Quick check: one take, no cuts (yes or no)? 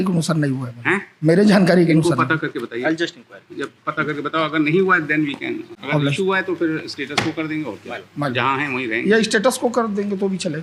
yes